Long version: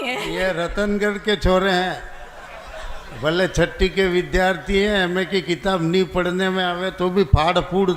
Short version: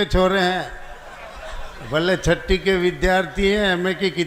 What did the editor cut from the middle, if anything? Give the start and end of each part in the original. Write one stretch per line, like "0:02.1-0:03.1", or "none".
none